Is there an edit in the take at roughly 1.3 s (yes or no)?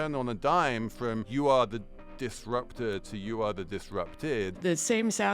yes